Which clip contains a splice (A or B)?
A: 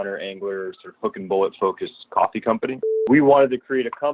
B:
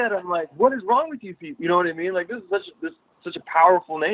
A